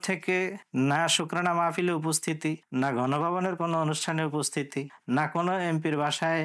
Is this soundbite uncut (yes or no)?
yes